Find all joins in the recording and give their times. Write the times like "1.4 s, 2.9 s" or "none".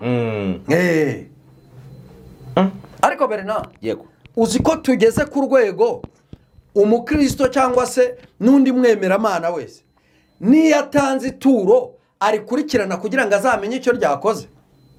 none